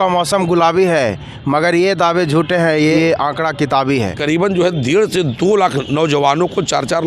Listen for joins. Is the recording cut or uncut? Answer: cut